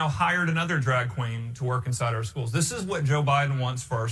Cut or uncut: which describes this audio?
cut